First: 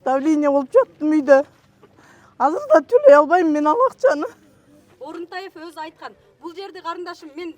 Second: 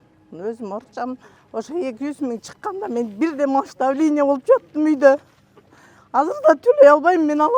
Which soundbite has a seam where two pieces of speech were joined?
first; 1 cut; at 4.8 s

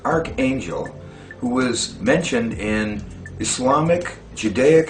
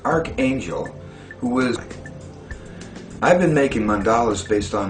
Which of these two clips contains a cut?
first; 1 cut; at 1.9 s

